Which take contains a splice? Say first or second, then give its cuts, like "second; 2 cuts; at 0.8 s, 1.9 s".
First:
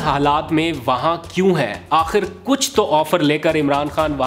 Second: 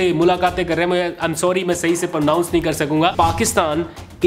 second; 1 cut; at 3.1 s